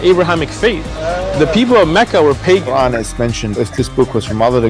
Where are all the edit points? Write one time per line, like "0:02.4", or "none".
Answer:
0:03.7